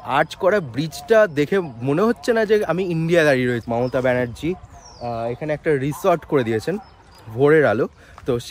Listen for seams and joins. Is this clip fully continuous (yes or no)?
no